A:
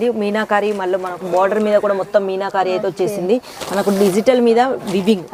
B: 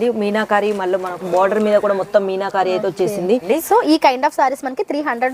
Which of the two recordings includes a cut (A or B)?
B